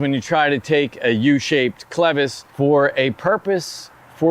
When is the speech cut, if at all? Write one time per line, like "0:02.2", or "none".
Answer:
0:02.4